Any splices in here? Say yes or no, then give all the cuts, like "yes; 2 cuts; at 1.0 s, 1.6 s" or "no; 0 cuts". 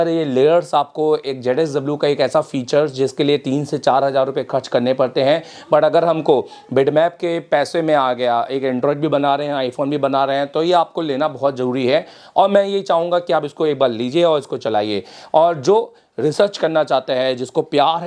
no; 0 cuts